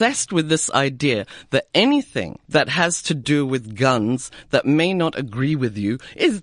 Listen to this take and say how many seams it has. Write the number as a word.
one